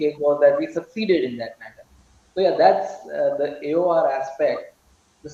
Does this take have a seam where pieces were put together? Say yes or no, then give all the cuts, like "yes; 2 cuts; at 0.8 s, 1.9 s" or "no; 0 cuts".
no; 0 cuts